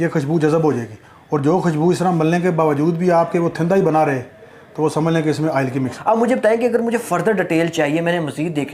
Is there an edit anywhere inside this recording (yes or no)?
no